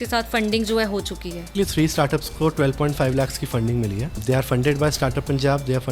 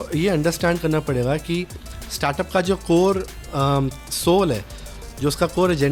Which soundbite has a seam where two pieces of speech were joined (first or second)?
first